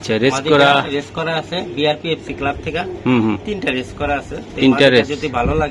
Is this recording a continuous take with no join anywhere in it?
yes; 0 cuts

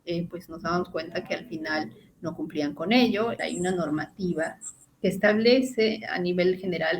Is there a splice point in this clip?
yes; 1 cut; at 3.4 s

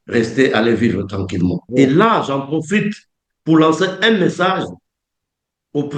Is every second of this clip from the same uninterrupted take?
no; 1 cut; at 1.6 s

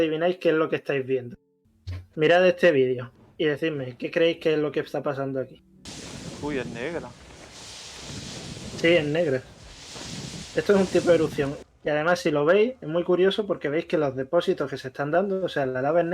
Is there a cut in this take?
yes; 1 cut; at 11.6 s

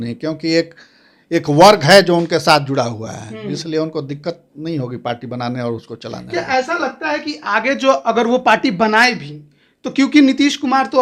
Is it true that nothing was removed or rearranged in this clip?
yes; 0 cuts

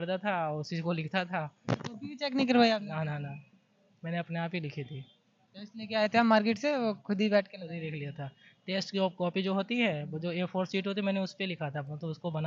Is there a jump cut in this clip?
no; 0 cuts

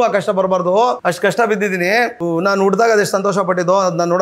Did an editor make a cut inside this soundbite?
yes; 2 cuts; at 1.0 s, 2.2 s

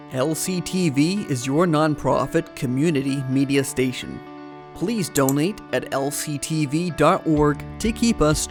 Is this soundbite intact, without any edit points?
yes; 0 cuts

